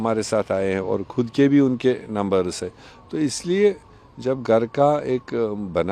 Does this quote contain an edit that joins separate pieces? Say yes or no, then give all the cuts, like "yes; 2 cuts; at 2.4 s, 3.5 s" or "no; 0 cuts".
no; 0 cuts